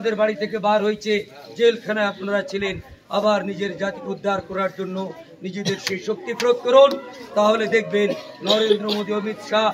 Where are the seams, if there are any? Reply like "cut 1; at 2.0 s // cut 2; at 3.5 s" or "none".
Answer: none